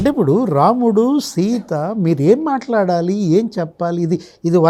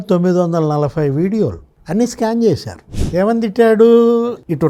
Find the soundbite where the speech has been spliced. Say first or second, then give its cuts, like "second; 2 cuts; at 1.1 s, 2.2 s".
second; 1 cut; at 2.9 s